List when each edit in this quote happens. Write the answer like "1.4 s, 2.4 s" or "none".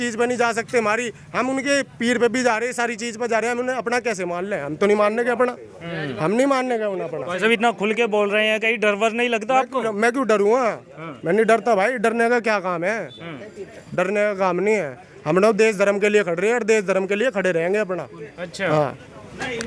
none